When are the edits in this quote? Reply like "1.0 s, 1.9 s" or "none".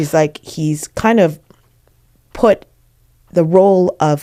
none